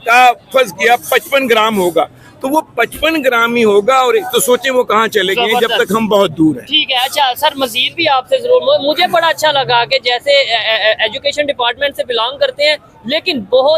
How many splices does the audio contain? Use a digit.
0